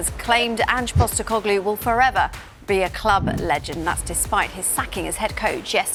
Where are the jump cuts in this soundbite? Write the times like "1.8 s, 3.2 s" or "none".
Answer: none